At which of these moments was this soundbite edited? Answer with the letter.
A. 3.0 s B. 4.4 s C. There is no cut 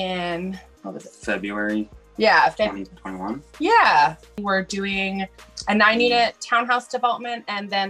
B